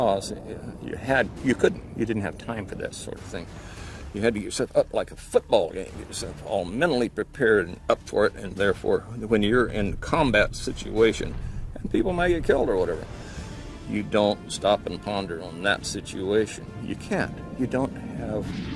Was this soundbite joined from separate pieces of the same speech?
no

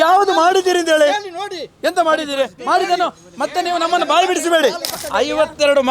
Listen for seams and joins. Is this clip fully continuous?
no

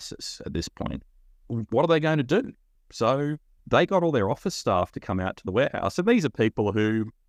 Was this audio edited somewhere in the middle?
no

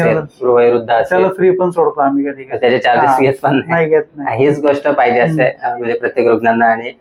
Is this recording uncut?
yes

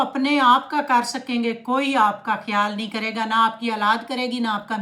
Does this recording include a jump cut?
no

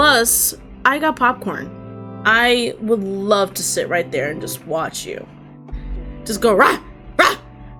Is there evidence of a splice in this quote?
no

